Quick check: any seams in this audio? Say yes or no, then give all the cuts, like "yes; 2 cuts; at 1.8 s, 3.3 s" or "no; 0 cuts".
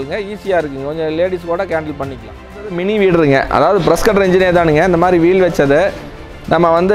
yes; 1 cut; at 2.5 s